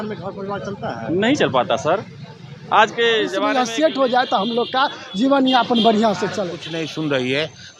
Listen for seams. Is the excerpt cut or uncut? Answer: cut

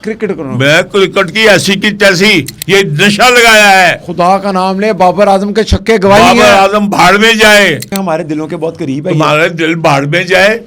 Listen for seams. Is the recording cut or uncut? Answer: cut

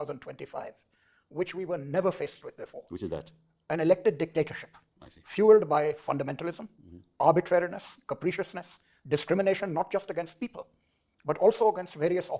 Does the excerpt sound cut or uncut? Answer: uncut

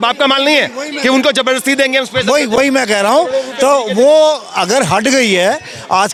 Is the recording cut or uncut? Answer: uncut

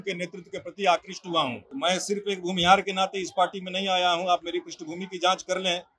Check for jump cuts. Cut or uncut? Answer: cut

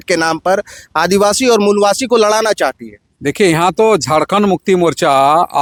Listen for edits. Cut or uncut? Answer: uncut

